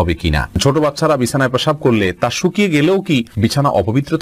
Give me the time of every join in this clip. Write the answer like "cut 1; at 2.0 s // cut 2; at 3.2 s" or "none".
cut 1; at 0.7 s // cut 2; at 3.3 s